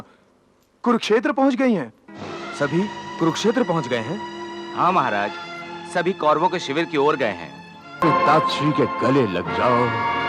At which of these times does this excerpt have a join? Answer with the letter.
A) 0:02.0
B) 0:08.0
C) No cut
B